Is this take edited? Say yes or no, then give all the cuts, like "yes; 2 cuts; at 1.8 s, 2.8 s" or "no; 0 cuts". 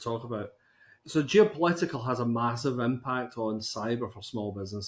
yes; 1 cut; at 0.9 s